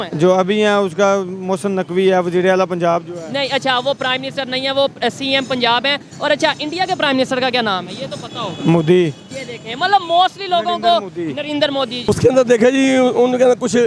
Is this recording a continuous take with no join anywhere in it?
no; 1 cut; at 12.1 s

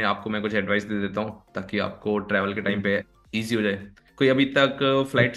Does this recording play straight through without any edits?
yes; 0 cuts

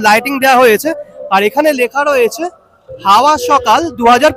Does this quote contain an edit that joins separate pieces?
no; 0 cuts

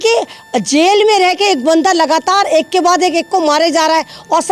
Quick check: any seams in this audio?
no; 0 cuts

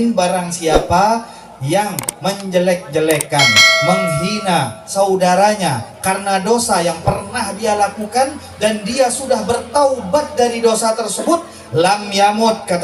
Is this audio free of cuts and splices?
yes; 0 cuts

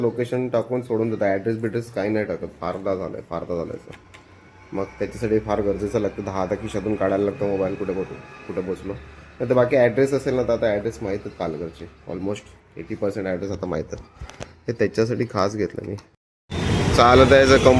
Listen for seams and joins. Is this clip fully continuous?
no; 1 cut; at 16.1 s

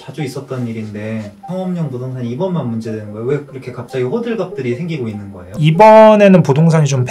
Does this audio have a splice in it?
yes; 2 cuts; at 1.4 s, 5.6 s

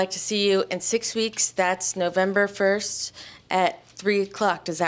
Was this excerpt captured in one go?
yes; 0 cuts

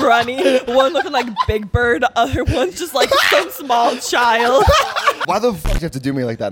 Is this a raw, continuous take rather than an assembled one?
no; 1 cut; at 4.8 s

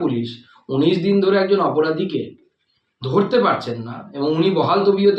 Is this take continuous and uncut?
yes; 0 cuts

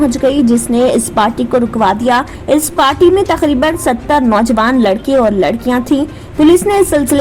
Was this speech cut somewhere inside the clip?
yes; 1 cut; at 2.3 s

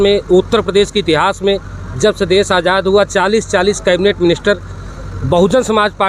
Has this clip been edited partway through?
no; 0 cuts

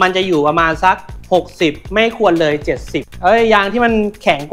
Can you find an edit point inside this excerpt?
yes; 1 cut; at 3.0 s

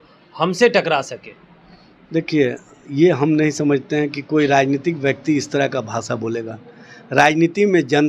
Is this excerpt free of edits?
yes; 0 cuts

